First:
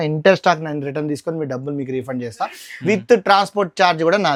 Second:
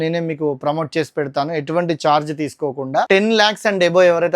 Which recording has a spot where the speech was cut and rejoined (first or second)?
second